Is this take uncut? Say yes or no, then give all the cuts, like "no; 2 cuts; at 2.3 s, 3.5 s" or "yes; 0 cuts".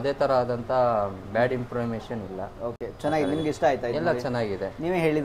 yes; 0 cuts